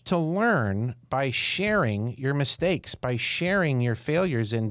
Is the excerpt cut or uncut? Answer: uncut